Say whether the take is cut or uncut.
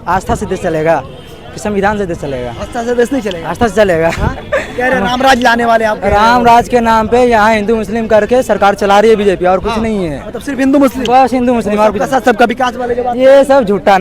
uncut